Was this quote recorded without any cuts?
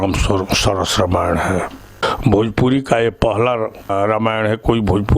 no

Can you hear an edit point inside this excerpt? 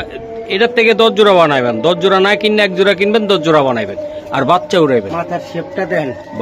no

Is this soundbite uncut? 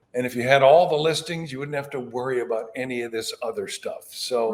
yes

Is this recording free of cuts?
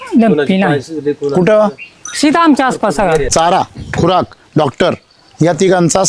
no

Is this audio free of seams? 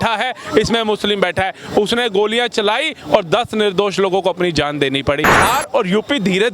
no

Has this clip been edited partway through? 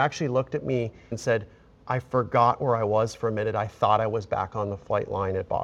yes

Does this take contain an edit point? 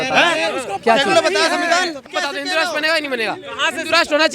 yes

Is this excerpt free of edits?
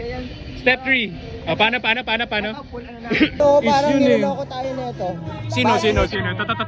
no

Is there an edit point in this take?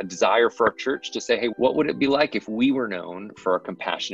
yes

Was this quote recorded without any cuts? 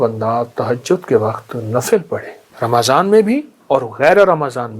no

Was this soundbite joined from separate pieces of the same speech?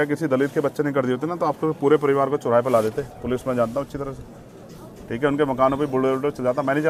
no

